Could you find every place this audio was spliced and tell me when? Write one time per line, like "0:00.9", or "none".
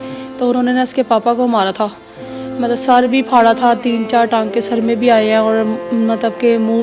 none